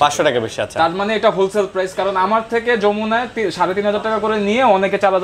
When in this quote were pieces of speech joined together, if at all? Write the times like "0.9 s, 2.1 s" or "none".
none